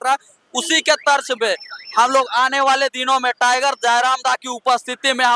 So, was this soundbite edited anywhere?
no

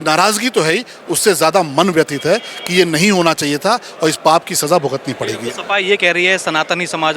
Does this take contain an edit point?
no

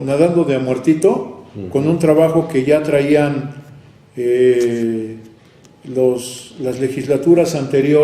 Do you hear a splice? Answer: no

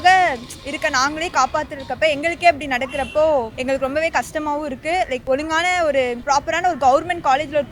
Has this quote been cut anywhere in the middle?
yes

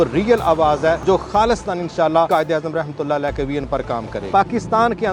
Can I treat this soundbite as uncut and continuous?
no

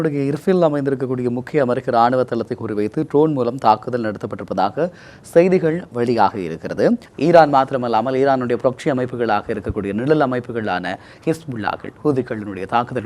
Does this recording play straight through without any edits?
no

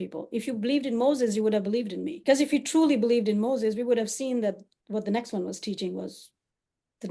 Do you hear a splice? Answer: yes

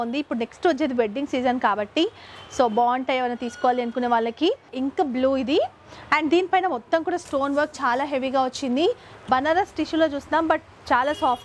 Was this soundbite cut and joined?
yes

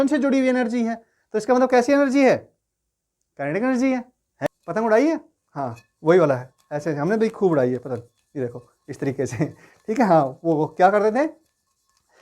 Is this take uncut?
no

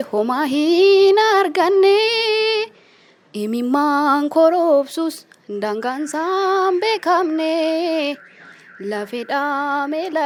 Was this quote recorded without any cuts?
yes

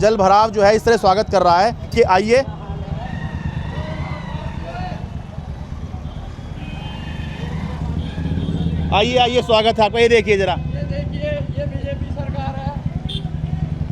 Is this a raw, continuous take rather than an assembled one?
yes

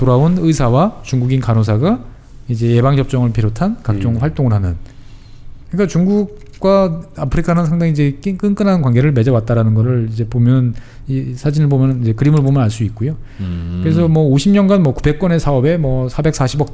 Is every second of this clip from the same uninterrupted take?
yes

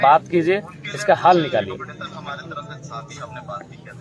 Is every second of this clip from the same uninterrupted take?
yes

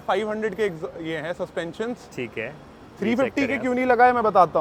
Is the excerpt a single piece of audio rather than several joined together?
yes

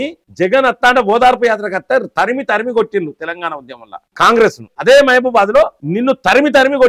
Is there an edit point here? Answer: yes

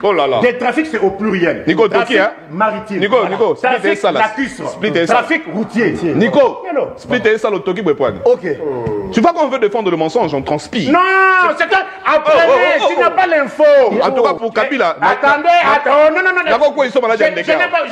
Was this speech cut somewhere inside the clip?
yes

